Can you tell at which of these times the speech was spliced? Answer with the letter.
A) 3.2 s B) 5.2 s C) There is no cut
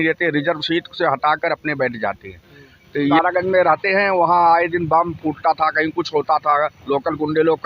A